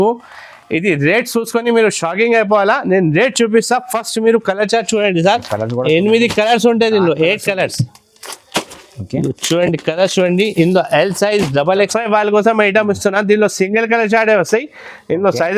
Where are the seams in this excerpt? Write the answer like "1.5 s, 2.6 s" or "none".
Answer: 11.9 s